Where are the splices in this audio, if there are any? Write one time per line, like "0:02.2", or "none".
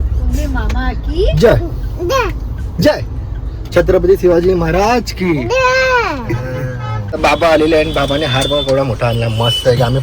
0:07.2

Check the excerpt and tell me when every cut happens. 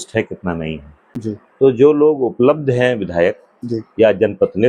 0:01.3

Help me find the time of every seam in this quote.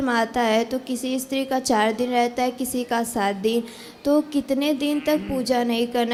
none

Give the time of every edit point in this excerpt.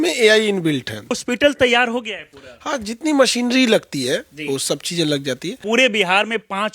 0:01.2
0:05.6

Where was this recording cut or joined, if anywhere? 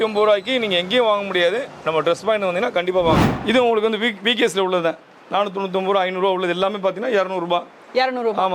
0:03.2

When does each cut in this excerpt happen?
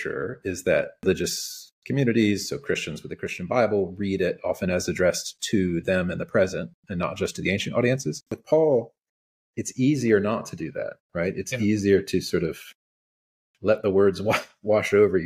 0:01.0
0:08.3

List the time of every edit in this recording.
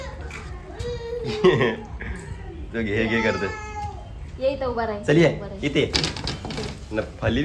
none

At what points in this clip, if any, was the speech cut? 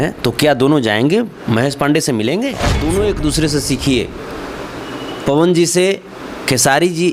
0:02.7

